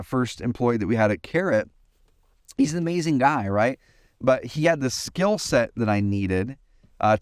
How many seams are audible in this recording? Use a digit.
0